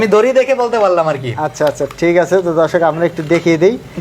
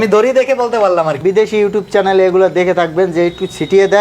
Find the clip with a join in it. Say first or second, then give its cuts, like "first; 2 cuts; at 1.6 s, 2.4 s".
second; 1 cut; at 1.2 s